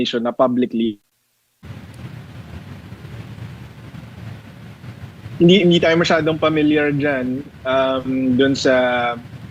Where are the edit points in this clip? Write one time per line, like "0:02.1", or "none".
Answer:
0:01.6